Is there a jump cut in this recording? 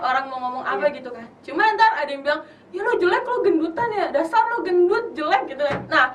no; 0 cuts

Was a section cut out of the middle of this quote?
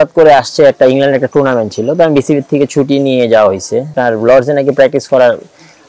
yes; 1 cut; at 3.9 s

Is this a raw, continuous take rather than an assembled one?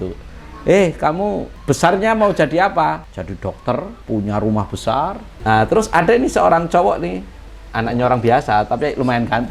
no; 4 cuts; at 1.5 s, 3.1 s, 4.0 s, 5.3 s

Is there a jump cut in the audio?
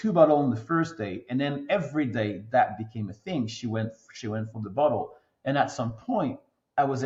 no; 0 cuts

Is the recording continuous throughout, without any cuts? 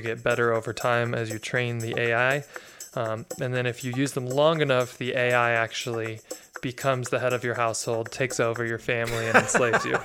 yes; 0 cuts

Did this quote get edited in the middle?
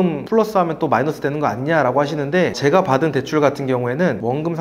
no; 0 cuts

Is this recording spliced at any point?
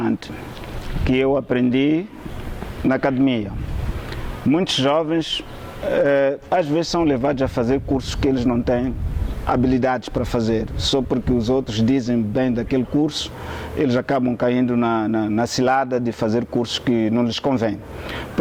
no; 0 cuts

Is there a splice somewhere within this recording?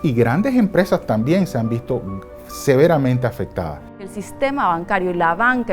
yes; 1 cut; at 4.1 s

